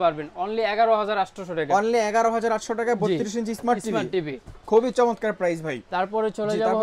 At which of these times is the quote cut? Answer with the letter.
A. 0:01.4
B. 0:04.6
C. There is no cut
C